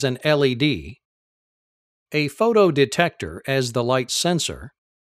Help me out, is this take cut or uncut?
uncut